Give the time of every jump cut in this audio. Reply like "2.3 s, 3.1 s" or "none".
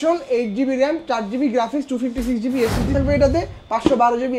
2.9 s